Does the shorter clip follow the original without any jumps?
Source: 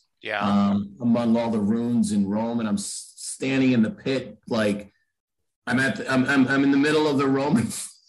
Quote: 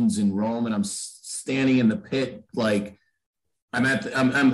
yes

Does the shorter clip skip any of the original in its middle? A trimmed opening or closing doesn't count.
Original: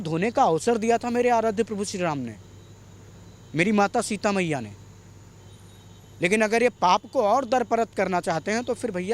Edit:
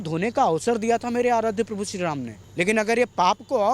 yes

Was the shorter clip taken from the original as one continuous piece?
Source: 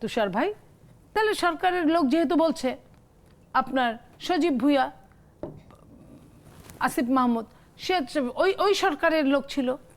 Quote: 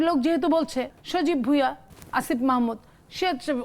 no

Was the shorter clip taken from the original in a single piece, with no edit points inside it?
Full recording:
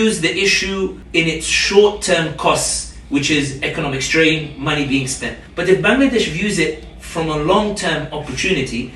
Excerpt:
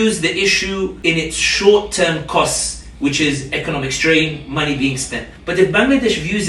no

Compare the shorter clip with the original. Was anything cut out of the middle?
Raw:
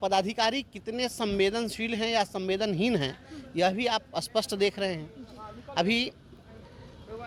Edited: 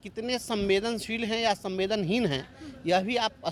no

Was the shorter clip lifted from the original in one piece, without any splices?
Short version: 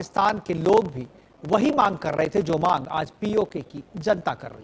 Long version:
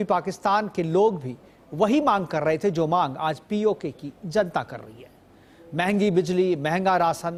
yes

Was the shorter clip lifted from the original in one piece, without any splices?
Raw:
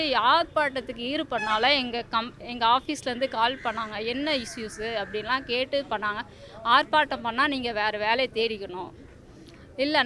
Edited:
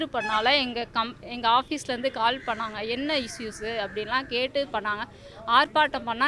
yes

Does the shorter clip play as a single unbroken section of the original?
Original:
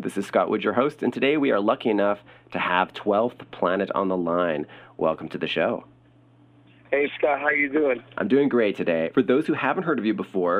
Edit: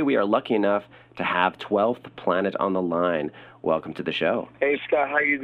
no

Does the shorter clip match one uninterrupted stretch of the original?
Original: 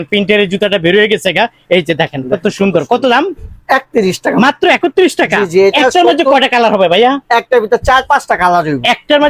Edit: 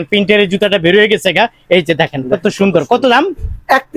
yes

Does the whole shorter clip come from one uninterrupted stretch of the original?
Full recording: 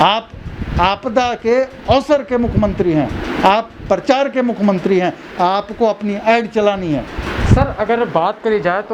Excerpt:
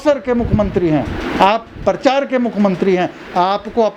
yes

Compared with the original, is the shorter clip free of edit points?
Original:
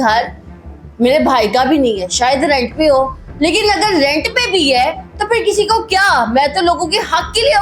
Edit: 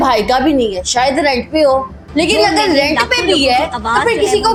yes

